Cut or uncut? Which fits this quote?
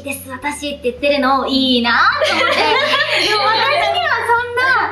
uncut